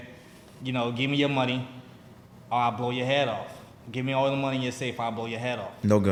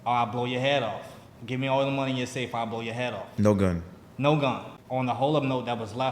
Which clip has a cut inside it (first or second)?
second